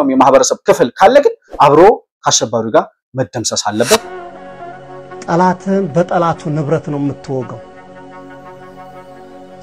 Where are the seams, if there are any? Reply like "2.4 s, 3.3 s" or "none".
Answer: 4.1 s